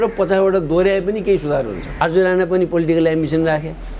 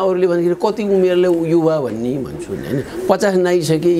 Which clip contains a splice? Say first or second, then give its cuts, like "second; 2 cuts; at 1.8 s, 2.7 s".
first; 1 cut; at 1.9 s